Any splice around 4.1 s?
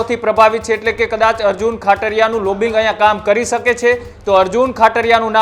yes; 1 cut; at 4.1 s

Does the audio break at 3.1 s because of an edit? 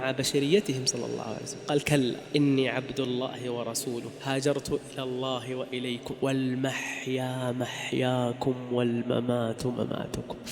no; 1 cut; at 6.1 s

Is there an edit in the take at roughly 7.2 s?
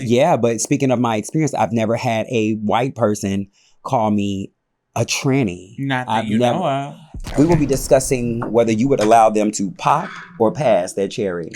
yes; 1 cut; at 7.2 s

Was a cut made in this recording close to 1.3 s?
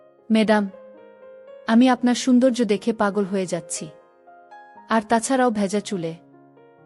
yes; 1 cut; at 1.3 s

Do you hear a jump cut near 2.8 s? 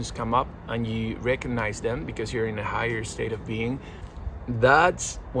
no; 1 cut; at 4.0 s

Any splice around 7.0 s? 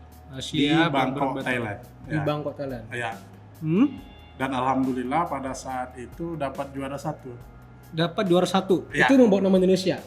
no; 0 cuts

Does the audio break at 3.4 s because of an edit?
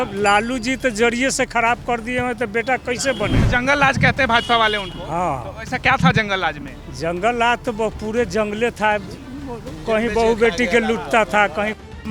yes; 1 cut; at 3.4 s

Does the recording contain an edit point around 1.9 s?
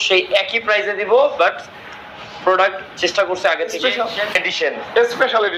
no; 1 cut; at 3.7 s

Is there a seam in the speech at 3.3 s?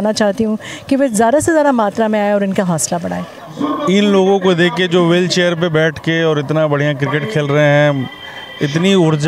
yes; 1 cut; at 3.3 s

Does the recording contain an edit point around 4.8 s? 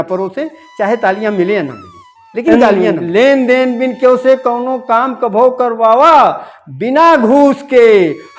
no; 1 cut; at 2.9 s

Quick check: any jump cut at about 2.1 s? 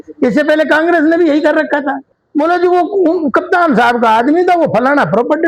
yes; 1 cut; at 2.1 s

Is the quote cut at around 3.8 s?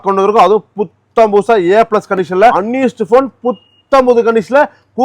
no; 1 cut; at 2.5 s

